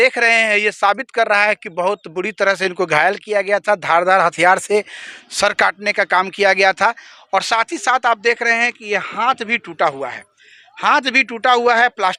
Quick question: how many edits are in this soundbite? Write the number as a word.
zero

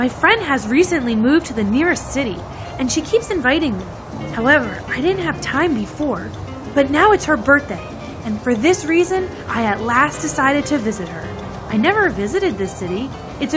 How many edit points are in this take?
one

